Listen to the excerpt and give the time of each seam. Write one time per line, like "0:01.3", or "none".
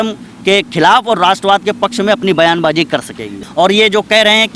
0:03.4